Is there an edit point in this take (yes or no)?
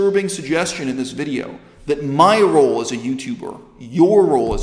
no